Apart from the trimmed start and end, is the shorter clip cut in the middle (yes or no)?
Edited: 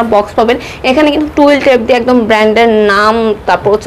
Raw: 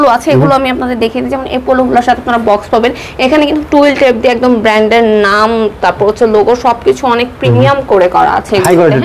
no